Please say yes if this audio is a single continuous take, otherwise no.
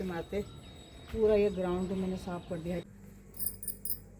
no